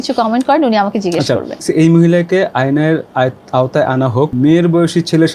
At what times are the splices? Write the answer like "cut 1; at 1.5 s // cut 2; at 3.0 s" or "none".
cut 1; at 1.7 s // cut 2; at 4.3 s